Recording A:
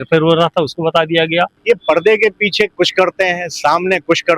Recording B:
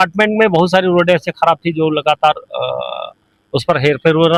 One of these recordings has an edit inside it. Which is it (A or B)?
A